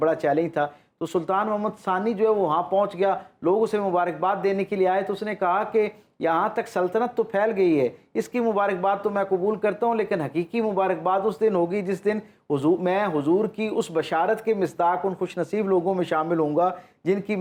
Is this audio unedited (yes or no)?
yes